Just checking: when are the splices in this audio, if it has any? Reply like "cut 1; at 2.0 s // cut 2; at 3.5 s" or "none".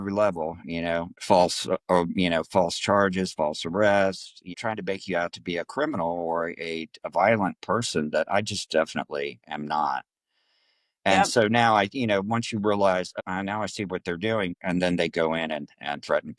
cut 1; at 4.5 s // cut 2; at 14.5 s

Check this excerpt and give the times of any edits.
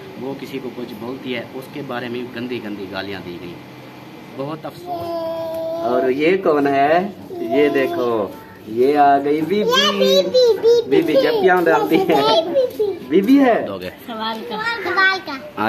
cut 1; at 4.8 s // cut 2; at 14.0 s

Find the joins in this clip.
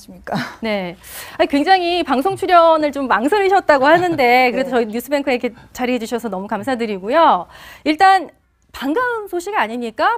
cut 1; at 4.7 s

